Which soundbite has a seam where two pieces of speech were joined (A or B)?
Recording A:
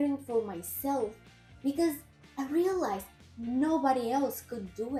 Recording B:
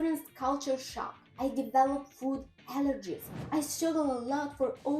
B